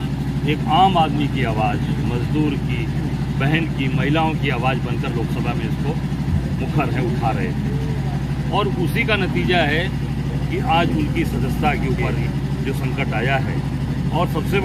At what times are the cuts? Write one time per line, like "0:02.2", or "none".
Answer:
0:12.1